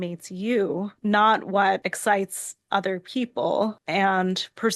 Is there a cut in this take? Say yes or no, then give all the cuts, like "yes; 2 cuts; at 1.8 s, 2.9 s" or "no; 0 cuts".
yes; 3 cuts; at 0.9 s, 1.9 s, 3.8 s